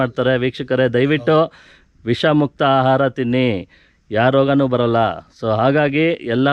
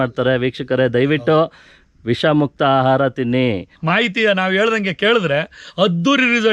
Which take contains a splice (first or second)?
second